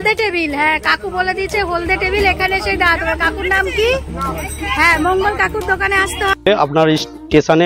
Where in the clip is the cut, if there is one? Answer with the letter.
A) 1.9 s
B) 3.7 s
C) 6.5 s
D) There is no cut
C